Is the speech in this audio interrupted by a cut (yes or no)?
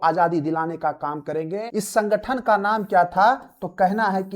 yes